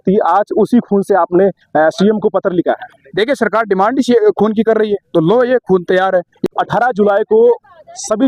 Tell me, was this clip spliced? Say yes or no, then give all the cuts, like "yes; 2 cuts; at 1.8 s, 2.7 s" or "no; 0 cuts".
yes; 1 cut; at 6.3 s